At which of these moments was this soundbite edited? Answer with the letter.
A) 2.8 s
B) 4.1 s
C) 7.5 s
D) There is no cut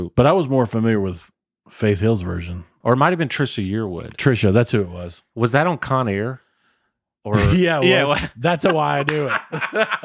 A